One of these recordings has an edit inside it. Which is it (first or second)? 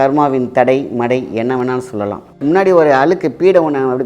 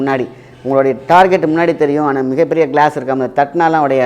first